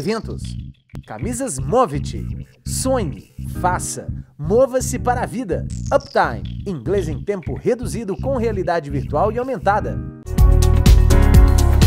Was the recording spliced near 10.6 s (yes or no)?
yes